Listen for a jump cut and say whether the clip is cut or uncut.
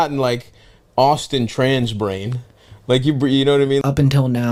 uncut